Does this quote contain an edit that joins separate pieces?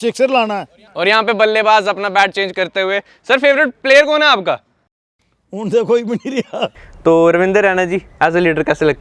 yes; 1 cut; at 6.8 s

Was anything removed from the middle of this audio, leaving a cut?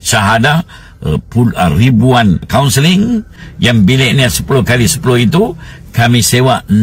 yes; 2 cuts; at 2.5 s, 3.4 s

